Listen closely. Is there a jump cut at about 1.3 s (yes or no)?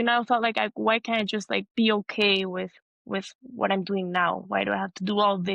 no